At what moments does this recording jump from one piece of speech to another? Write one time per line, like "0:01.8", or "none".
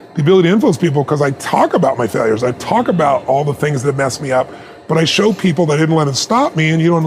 none